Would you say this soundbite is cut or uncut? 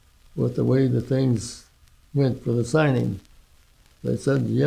uncut